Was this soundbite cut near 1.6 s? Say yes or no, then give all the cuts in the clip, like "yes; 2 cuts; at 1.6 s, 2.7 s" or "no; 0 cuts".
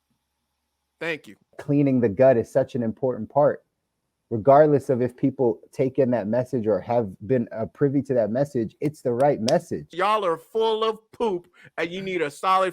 yes; 2 cuts; at 1.6 s, 9.9 s